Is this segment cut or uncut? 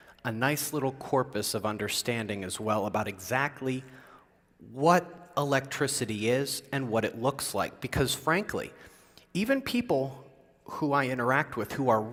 uncut